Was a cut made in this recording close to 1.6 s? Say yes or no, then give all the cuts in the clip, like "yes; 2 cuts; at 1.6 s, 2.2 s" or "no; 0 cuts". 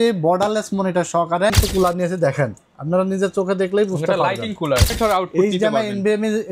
yes; 2 cuts; at 1.6 s, 4.9 s